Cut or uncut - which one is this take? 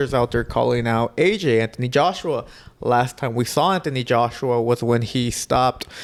uncut